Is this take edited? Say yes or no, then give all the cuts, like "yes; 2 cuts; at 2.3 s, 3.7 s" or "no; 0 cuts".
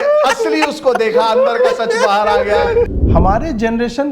yes; 1 cut; at 2.9 s